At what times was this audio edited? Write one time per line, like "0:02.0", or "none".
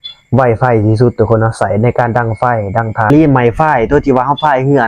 0:03.1

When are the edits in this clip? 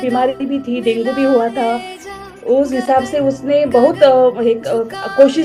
none

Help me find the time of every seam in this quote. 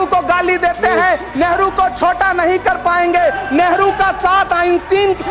none

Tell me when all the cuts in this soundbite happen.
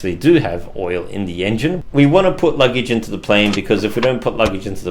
0:01.8

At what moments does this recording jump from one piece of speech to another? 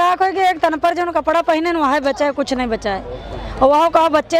none

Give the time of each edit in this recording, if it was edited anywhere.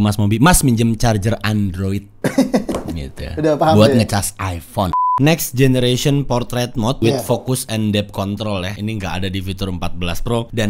0:05.1

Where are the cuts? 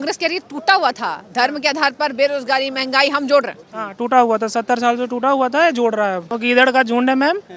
0:06.3

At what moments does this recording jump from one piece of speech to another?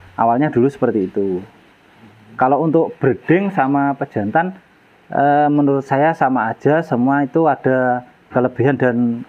none

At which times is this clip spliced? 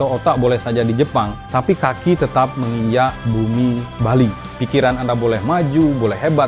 0:01.4
0:03.2
0:04.5

